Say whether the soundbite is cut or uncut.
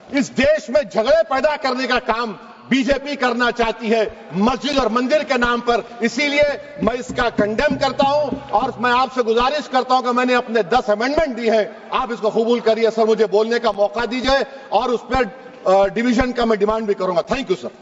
uncut